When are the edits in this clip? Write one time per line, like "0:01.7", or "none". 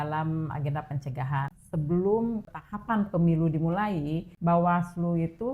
0:01.6
0:02.5
0:04.3